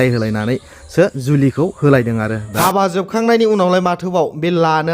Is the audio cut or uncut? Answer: cut